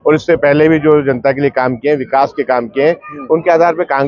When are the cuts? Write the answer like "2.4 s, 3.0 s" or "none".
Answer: none